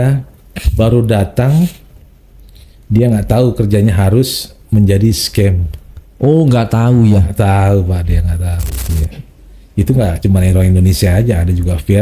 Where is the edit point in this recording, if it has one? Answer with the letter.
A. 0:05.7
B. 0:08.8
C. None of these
B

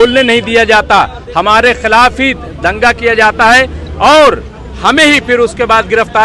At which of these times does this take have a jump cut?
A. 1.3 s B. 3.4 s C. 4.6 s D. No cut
D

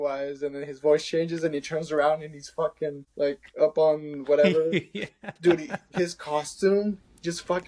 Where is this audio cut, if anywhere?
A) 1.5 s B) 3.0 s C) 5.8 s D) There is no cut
B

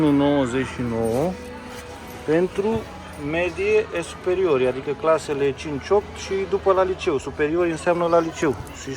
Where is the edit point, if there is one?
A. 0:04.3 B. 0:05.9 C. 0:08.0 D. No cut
D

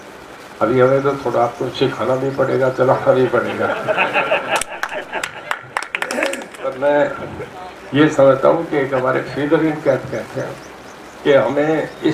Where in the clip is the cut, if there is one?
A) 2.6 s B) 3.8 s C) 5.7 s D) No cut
D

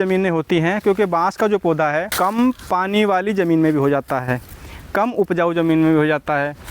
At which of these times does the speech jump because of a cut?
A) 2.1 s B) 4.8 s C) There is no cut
A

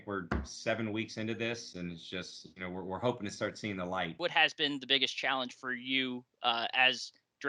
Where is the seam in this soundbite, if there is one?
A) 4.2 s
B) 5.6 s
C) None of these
A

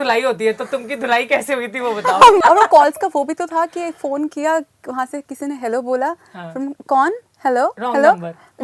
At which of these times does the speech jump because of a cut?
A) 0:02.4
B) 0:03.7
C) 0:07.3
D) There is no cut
A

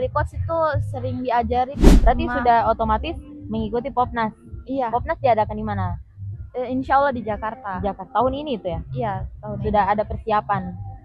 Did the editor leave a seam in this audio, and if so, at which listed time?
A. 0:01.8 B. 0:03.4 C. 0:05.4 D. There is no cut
A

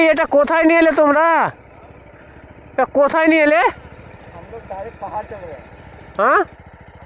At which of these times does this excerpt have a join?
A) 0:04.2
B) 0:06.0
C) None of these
C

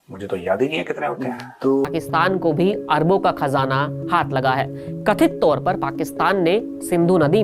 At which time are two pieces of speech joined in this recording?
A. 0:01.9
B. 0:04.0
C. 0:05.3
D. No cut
A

